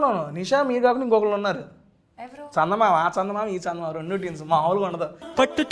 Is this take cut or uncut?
uncut